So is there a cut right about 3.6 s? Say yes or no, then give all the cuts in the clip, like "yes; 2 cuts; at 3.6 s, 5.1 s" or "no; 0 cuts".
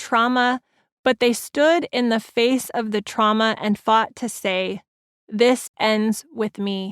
no; 0 cuts